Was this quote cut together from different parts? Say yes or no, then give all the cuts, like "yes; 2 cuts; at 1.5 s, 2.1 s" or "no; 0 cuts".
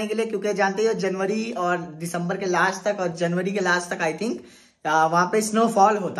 no; 0 cuts